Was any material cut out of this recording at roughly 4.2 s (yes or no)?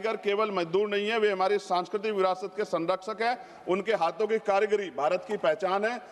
no